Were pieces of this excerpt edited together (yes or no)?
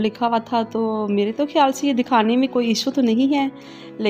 no